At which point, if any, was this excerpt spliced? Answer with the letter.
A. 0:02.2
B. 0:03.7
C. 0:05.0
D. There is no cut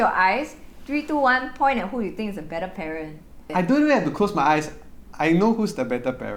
D